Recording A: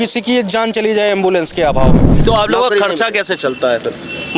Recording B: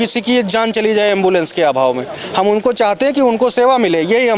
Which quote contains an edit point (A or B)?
A